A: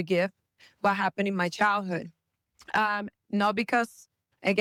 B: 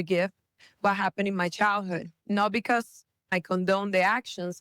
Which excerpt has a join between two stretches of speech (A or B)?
B